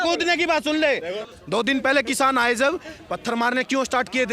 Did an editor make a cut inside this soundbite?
yes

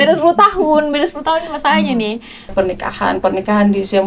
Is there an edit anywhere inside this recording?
yes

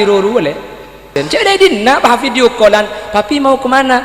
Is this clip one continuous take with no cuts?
no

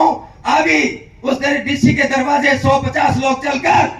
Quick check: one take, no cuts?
yes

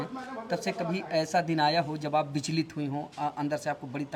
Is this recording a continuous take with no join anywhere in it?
yes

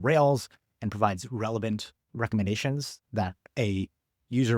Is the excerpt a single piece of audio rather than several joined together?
no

